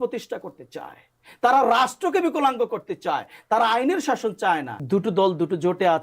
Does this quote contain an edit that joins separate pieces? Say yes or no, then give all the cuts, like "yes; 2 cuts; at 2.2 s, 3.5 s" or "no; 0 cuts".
yes; 1 cut; at 4.8 s